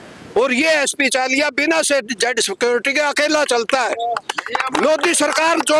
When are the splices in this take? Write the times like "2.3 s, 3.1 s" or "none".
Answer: none